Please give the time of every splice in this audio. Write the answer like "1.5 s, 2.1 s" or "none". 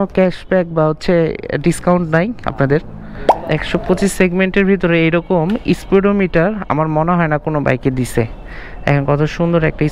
3.5 s